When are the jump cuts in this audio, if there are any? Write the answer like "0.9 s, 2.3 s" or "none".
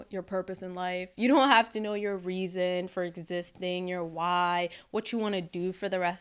none